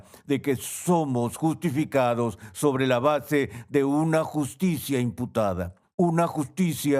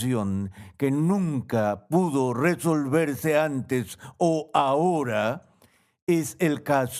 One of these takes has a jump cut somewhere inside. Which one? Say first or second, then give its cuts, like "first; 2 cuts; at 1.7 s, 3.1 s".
first; 1 cut; at 5.8 s